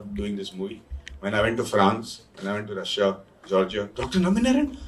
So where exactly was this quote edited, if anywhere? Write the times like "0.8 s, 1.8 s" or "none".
4.0 s